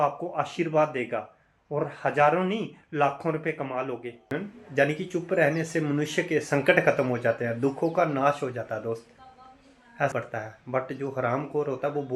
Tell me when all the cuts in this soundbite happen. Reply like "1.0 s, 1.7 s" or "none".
4.2 s, 10.1 s